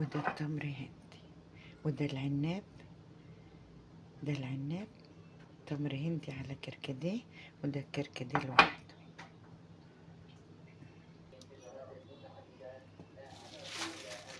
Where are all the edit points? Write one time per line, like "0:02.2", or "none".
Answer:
none